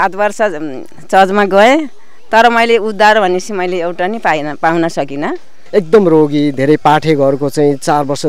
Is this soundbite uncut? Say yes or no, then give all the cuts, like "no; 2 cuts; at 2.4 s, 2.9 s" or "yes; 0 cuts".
no; 1 cut; at 5.5 s